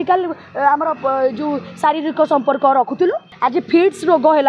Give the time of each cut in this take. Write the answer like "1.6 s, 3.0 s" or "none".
3.3 s

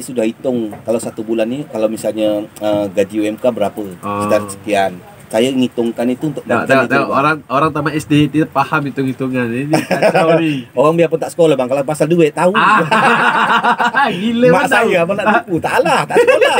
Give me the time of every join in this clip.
none

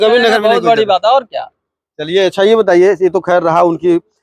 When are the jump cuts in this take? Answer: none

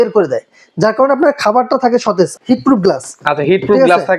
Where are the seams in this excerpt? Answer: 2.3 s

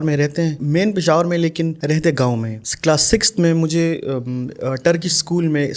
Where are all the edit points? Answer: 2.5 s

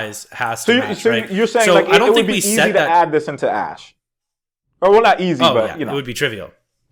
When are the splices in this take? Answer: none

